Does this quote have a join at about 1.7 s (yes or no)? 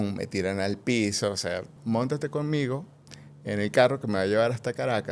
yes